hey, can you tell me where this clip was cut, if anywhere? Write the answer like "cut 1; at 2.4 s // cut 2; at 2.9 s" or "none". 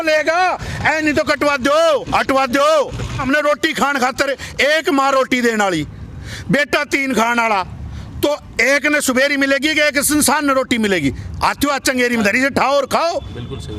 cut 1; at 3.2 s